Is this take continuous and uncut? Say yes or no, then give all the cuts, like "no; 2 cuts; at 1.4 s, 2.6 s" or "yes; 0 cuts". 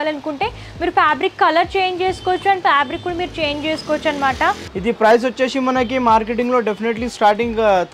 no; 1 cut; at 4.7 s